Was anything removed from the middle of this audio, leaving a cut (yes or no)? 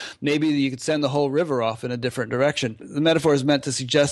yes